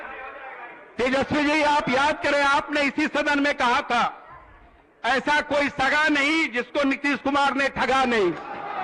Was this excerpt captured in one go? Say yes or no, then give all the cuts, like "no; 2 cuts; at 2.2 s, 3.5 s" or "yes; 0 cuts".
yes; 0 cuts